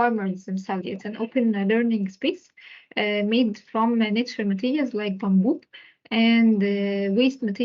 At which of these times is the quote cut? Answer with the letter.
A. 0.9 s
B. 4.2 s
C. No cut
A